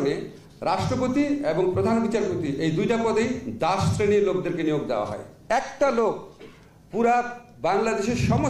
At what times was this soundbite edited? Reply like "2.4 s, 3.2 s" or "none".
5.3 s